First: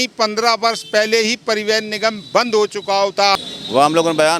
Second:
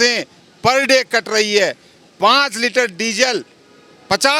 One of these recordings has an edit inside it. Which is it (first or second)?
first